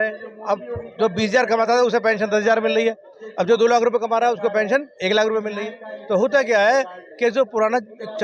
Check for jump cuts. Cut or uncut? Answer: uncut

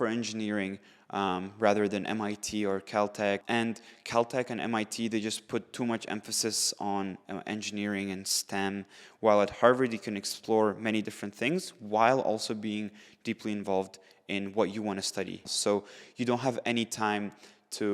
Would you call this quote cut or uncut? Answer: cut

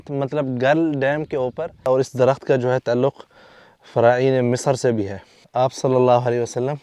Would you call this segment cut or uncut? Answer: cut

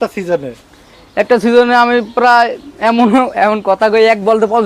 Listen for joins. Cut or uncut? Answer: uncut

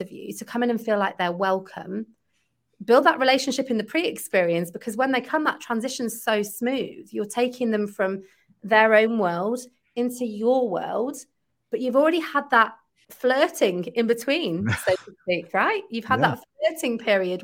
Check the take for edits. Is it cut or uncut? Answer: uncut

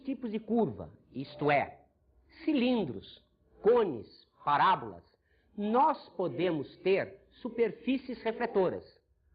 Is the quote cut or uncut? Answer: cut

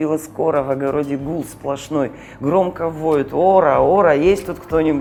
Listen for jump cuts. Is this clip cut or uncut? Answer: uncut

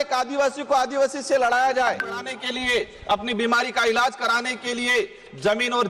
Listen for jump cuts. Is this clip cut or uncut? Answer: cut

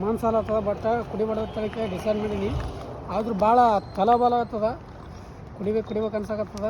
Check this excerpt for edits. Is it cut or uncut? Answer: uncut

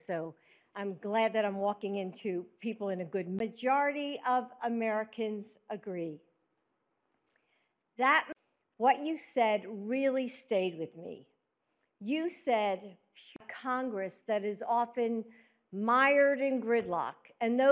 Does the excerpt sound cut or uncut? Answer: uncut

